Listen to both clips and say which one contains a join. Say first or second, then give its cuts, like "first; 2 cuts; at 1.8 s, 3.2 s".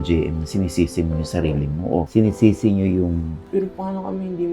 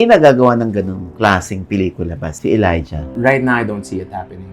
first; 1 cut; at 3.4 s